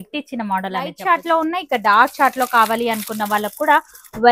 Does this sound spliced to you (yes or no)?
yes